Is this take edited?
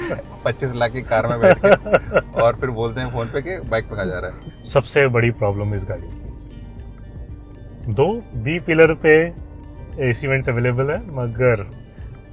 yes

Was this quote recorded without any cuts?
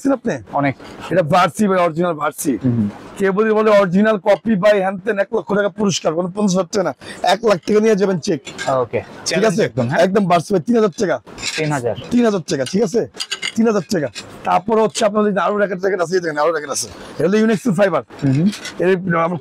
yes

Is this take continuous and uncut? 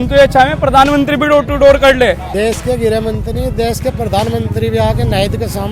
no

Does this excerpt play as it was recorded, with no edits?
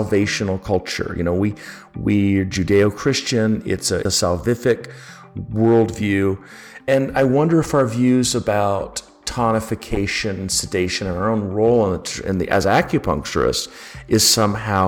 no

